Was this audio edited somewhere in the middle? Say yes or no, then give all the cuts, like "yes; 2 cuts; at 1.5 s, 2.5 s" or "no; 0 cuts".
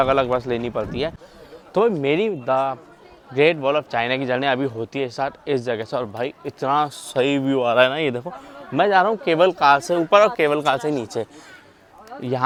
no; 0 cuts